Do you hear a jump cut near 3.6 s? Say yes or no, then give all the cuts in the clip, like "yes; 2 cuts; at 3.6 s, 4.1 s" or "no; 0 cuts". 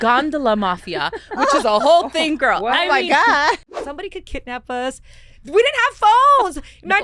yes; 1 cut; at 3.6 s